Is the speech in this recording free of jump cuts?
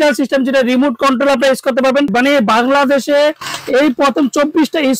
no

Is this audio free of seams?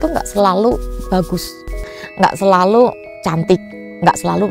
no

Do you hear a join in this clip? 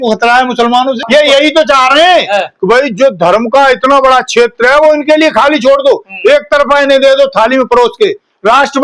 yes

